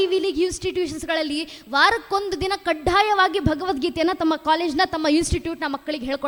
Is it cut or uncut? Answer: uncut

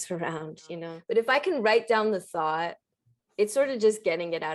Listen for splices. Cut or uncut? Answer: cut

